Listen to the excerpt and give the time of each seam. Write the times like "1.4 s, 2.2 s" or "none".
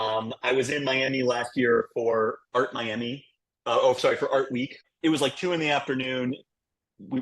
4.9 s